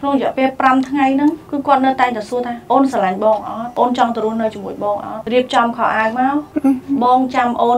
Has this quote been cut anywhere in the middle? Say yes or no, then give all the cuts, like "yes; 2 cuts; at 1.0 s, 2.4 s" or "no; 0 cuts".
yes; 5 cuts; at 1.4 s, 2.6 s, 3.6 s, 5.1 s, 6.5 s